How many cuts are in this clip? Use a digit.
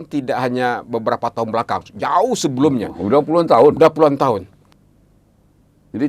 1